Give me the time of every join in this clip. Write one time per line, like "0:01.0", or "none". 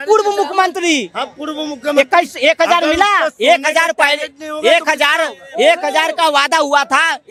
none